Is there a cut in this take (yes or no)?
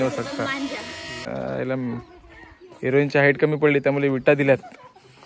yes